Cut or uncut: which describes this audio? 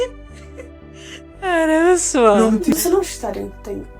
cut